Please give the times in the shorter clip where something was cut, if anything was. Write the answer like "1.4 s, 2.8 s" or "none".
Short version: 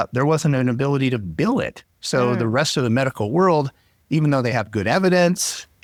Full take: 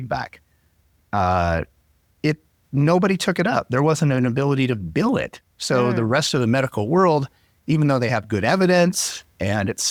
none